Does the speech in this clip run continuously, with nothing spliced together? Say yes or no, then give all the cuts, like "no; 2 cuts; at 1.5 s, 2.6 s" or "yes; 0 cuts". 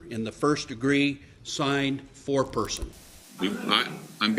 no; 1 cut; at 2.9 s